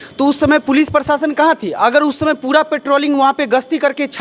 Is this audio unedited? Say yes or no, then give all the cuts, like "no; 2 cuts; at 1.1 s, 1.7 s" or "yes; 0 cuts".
yes; 0 cuts